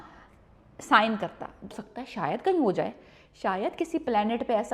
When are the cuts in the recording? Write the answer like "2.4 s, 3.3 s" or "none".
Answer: 1.7 s